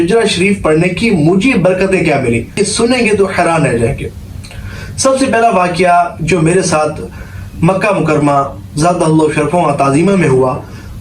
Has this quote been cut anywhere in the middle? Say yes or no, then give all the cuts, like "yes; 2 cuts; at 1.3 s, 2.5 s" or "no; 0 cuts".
yes; 1 cut; at 2.6 s